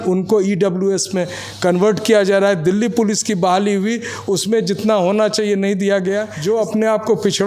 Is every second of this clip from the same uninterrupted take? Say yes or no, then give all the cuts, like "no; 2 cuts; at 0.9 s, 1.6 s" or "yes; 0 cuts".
no; 1 cut; at 6.3 s